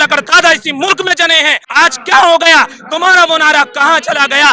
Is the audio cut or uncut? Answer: cut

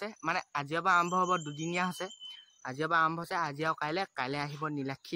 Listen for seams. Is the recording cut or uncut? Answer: uncut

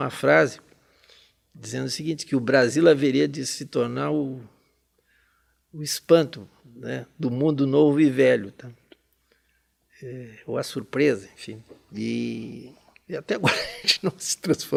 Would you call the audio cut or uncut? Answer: uncut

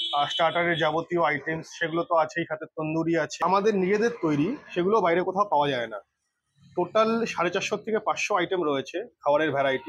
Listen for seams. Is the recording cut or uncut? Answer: uncut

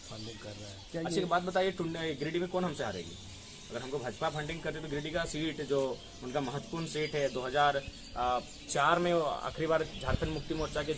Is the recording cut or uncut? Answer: uncut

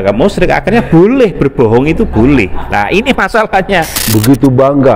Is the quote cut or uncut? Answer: cut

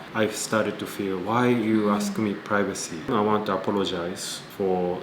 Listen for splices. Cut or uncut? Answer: cut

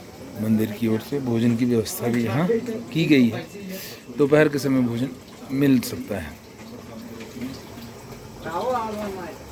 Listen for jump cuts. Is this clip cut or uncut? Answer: cut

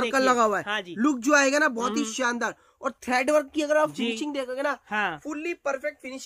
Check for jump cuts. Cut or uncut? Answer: uncut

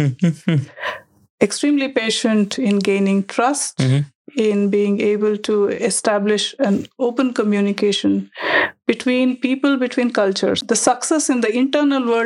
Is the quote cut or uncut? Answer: cut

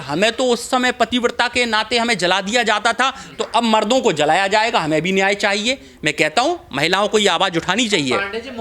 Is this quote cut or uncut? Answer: uncut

